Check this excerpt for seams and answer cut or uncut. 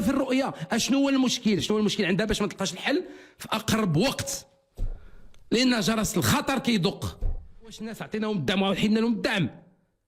cut